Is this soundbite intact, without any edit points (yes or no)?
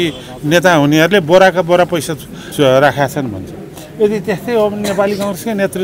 no